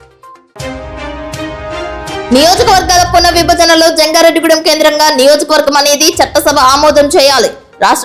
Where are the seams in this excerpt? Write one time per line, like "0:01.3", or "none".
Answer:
none